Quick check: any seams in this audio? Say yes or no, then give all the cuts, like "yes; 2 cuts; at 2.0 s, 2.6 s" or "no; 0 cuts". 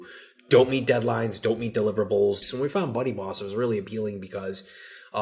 yes; 1 cut; at 2.4 s